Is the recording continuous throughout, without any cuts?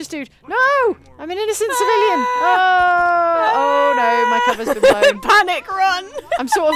no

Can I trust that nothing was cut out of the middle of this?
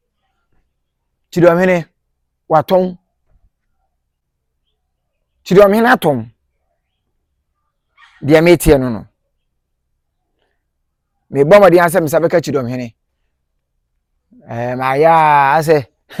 yes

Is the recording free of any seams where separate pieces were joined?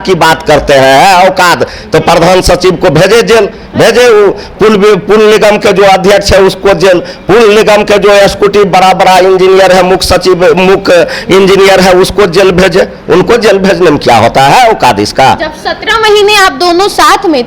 yes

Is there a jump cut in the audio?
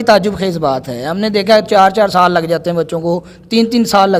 no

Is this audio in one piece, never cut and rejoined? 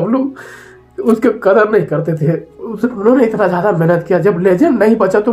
yes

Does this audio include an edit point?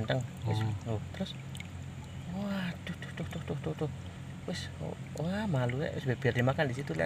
no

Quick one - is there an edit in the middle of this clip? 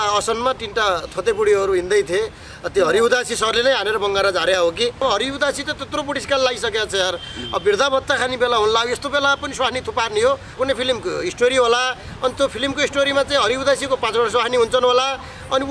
yes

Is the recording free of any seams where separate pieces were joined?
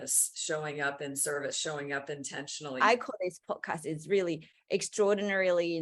no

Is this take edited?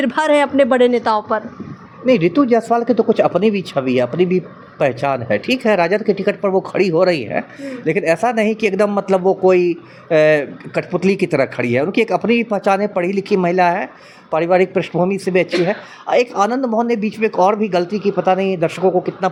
no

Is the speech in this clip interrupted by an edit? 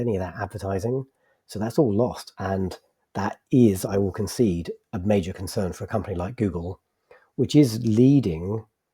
yes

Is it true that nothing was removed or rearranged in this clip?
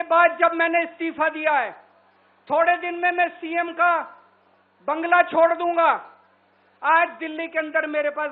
yes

